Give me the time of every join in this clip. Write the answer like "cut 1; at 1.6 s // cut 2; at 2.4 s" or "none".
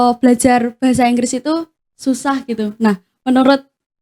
none